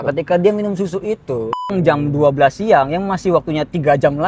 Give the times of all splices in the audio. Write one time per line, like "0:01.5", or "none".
0:01.7